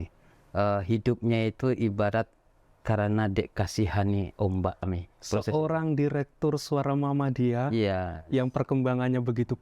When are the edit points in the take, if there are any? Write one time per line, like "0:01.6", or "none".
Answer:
0:04.9